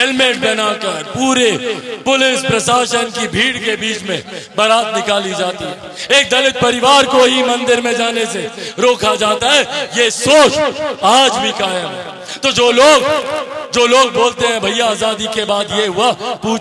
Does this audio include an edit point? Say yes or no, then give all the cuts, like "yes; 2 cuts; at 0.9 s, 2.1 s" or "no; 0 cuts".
no; 0 cuts